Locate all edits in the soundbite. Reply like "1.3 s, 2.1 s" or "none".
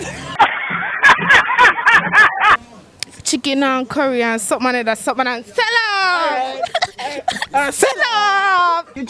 2.6 s